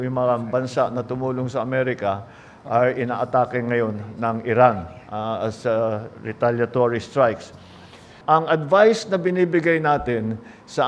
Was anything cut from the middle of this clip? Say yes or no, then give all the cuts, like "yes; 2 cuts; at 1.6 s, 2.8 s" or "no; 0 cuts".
yes; 1 cut; at 8.1 s